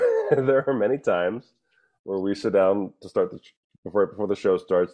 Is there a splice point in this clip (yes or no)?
no